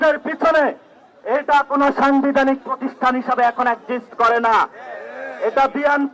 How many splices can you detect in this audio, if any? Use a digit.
0